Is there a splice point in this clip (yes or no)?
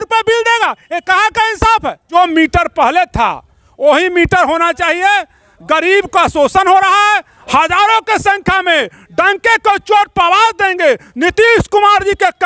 yes